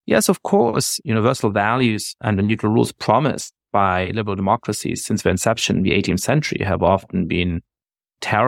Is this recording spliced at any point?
yes; 2 cuts; at 0.9 s, 2.1 s

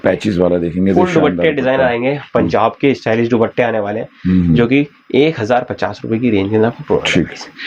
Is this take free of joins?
yes; 0 cuts

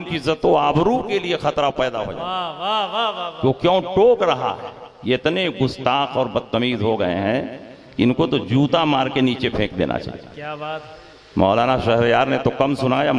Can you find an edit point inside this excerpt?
no; 0 cuts

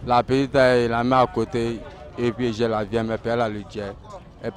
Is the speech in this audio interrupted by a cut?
no; 0 cuts

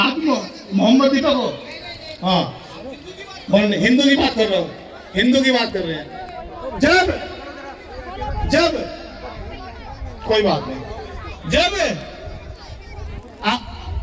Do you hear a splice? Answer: no; 0 cuts

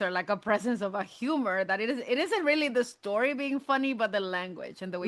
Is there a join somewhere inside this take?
no; 0 cuts

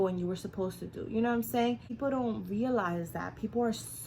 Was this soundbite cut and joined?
yes; 1 cut; at 1.9 s

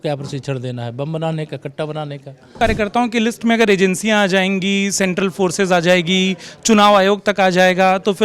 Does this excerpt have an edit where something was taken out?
yes; 1 cut; at 2.6 s

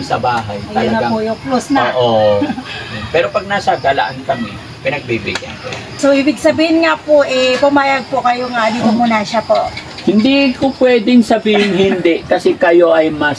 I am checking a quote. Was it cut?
yes; 1 cut; at 5.9 s

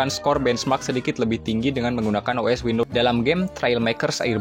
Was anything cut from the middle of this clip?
yes; 1 cut; at 2.9 s

